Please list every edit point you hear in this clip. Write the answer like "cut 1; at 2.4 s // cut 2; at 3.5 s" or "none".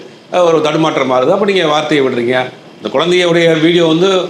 none